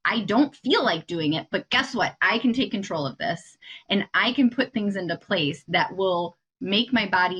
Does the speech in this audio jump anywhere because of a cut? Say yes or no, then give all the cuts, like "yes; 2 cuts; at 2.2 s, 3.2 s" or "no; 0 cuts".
no; 0 cuts